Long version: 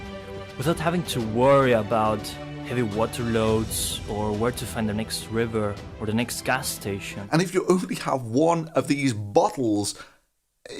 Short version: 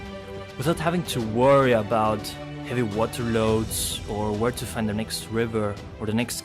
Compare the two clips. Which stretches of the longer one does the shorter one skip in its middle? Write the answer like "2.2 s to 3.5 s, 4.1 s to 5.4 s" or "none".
none